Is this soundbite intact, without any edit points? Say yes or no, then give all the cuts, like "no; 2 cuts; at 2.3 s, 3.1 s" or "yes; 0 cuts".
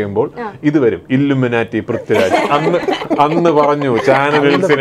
yes; 0 cuts